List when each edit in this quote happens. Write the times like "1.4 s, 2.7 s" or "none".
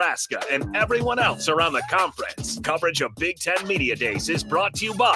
3.1 s